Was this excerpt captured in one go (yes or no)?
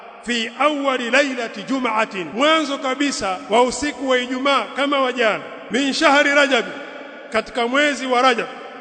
no